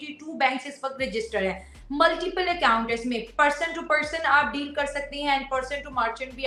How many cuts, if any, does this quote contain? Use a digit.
0